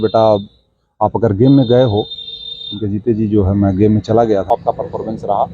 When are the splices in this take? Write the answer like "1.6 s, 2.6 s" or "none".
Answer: 4.5 s